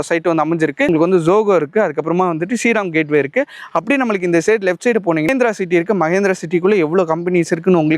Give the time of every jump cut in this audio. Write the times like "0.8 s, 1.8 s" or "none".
0.9 s, 5.3 s